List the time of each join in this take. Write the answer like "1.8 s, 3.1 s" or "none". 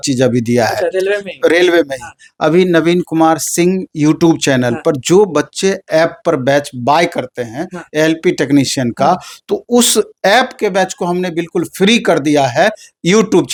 none